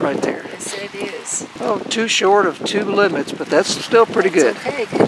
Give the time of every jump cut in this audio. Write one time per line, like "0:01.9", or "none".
0:01.6